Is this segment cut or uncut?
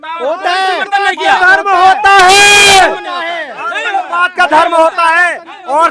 uncut